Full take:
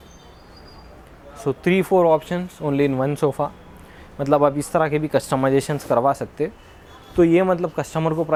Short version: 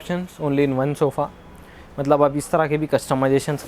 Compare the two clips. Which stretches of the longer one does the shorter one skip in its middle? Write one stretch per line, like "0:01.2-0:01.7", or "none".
none